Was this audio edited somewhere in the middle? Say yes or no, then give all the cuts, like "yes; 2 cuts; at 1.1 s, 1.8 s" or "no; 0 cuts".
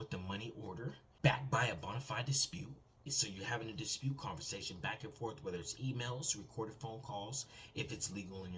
yes; 2 cuts; at 1.1 s, 3.1 s